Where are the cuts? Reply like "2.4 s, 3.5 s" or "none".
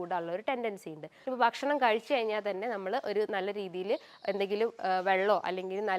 1.1 s